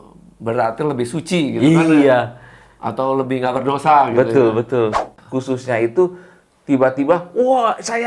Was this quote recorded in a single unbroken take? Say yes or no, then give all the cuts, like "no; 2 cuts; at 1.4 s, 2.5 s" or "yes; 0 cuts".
no; 1 cut; at 5.1 s